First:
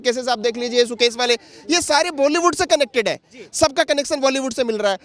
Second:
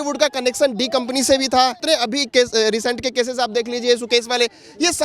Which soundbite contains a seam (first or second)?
second